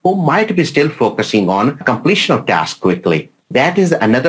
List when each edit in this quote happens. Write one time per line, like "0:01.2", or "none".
0:01.8
0:03.5